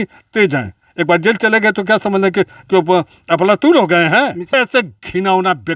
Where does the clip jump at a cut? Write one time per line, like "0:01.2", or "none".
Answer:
0:04.5

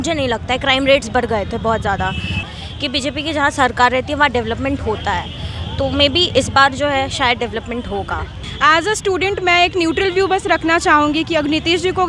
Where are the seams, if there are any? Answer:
0:02.4
0:08.4

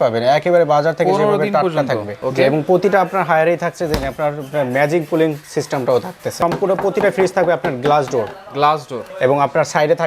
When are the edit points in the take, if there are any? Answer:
0:02.2
0:06.4
0:09.0

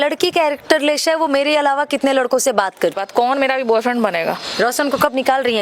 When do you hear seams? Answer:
0:03.0
0:04.5

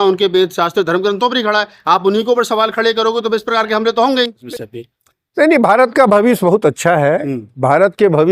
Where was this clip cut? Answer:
0:04.4

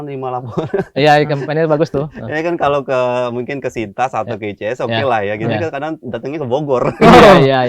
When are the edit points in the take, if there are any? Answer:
none

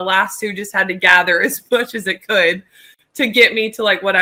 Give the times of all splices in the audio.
none

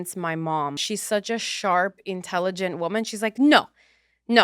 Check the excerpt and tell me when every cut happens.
0:00.9

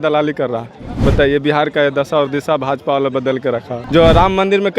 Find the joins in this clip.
0:03.8

